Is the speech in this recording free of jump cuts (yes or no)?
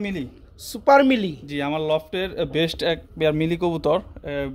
yes